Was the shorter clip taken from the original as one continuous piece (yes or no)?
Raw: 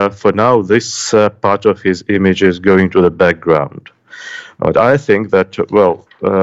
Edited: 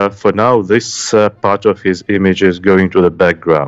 yes